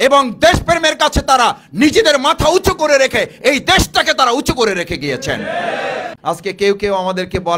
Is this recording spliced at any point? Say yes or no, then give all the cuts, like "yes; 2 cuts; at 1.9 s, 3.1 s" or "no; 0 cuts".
yes; 1 cut; at 6.1 s